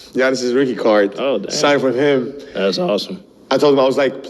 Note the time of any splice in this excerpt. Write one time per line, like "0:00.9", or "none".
none